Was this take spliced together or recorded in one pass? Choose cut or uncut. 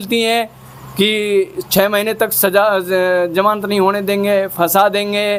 uncut